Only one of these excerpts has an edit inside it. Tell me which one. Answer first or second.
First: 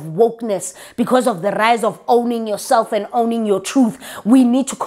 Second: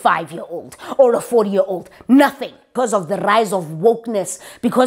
second